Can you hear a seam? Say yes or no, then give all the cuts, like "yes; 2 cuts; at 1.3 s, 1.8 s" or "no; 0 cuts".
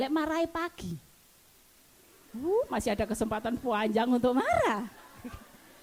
no; 0 cuts